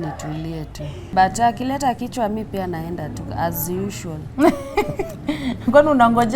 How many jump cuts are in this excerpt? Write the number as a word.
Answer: one